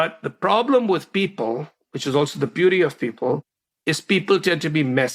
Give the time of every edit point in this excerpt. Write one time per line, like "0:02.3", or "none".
none